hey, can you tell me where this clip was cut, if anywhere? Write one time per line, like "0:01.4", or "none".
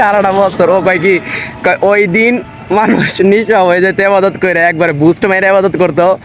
none